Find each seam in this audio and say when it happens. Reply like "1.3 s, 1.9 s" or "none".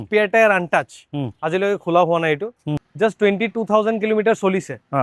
2.8 s